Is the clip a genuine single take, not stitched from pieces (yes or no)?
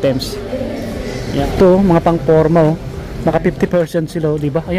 no